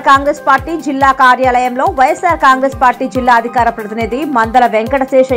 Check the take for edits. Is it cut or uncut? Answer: uncut